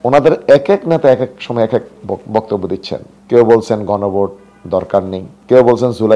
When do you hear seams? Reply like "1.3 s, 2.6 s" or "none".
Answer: 3.1 s, 5.3 s